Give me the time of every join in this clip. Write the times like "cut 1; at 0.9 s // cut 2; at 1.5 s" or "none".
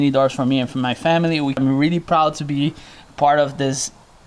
none